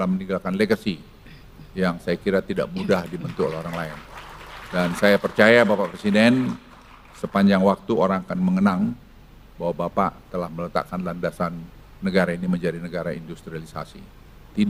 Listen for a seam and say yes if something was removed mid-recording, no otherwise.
no